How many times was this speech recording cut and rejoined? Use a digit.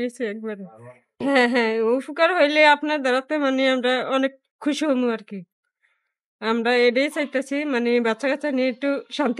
1